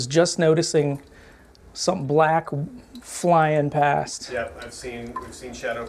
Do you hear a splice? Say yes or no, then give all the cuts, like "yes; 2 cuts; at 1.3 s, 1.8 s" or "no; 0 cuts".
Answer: no; 0 cuts